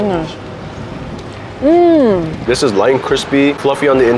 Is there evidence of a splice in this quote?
yes; 1 cut; at 2.4 s

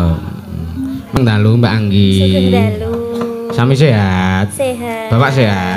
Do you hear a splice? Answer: yes; 1 cut; at 1.2 s

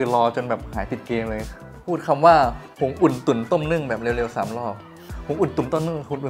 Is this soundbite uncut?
no; 1 cut; at 1.5 s

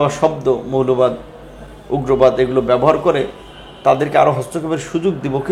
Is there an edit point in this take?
no; 0 cuts

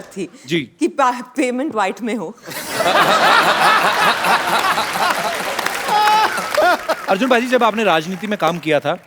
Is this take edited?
yes; 1 cut; at 6.6 s

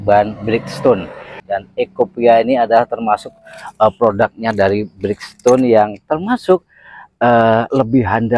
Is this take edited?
yes; 1 cut; at 1.4 s

